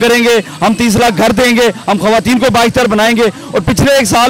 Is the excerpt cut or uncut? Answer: uncut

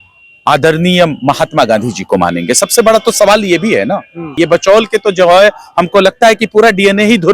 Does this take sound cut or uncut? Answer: cut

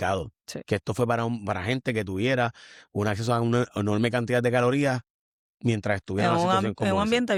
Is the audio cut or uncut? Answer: uncut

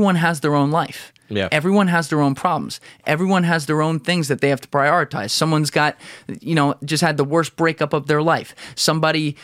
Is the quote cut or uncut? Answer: uncut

